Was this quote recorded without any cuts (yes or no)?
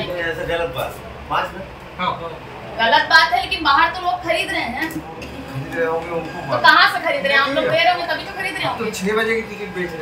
yes